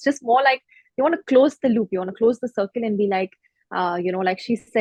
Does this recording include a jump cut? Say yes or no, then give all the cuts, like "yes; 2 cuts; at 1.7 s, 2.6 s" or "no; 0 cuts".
no; 0 cuts